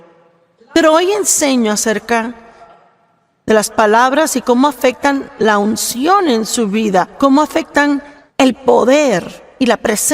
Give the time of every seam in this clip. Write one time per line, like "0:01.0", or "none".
0:08.2

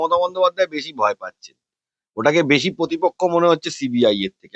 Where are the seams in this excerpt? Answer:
none

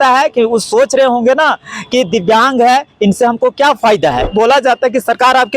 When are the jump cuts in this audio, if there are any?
0:04.2

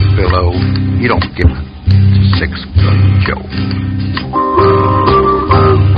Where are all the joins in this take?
0:01.5

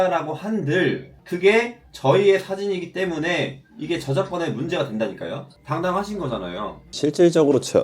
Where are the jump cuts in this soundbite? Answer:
0:05.5
0:06.9

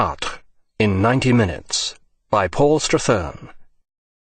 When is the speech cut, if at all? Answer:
none

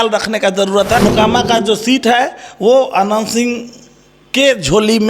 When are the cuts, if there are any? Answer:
0:01.0

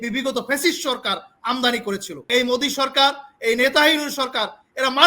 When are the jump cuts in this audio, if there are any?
0:02.3

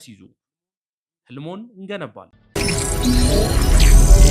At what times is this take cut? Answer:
0:02.4

